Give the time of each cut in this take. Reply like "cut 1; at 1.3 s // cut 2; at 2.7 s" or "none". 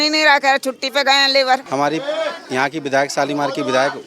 cut 1; at 1.6 s